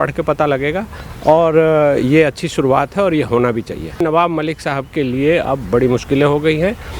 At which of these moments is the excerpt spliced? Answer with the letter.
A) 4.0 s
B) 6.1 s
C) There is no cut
A